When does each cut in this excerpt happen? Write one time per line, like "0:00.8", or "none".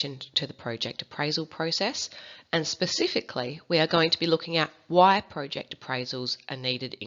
0:03.9